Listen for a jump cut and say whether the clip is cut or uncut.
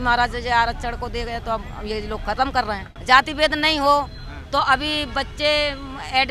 cut